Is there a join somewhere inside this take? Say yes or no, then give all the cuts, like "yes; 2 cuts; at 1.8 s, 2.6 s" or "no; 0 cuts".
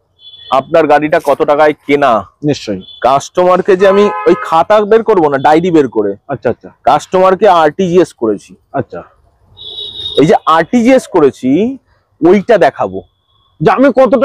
no; 0 cuts